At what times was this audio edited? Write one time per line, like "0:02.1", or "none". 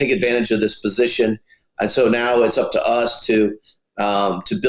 none